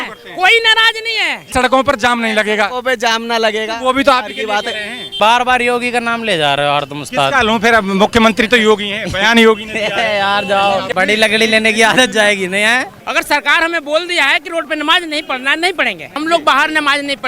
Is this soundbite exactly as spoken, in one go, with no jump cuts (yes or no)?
no